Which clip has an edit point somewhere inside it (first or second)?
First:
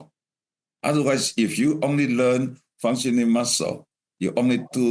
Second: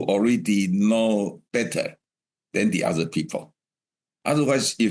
second